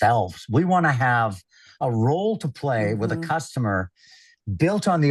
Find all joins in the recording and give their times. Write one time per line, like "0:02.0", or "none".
none